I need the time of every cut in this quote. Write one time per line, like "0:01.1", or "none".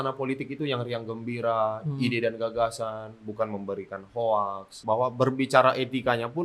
0:04.8